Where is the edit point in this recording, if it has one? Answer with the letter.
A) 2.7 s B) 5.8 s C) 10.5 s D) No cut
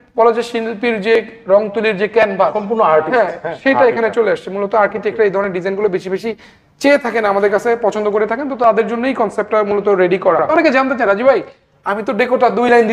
C